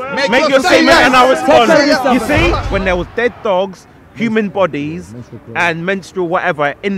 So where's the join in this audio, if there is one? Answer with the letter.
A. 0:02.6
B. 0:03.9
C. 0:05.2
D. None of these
A